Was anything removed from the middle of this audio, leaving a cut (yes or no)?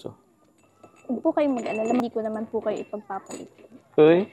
yes